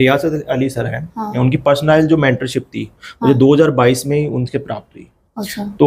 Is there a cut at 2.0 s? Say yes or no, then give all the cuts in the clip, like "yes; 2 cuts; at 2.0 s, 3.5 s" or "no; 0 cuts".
no; 0 cuts